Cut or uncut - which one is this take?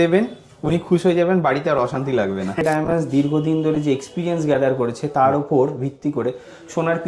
cut